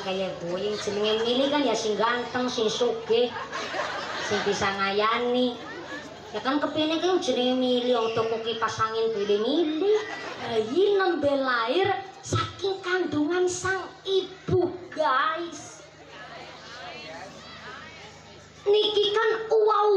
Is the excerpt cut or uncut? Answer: cut